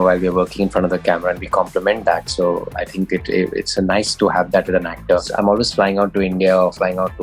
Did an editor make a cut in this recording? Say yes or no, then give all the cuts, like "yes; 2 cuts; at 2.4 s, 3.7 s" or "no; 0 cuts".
yes; 1 cut; at 5.3 s